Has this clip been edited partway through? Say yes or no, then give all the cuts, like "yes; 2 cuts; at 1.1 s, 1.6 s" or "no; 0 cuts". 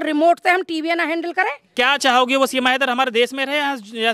yes; 1 cut; at 1.6 s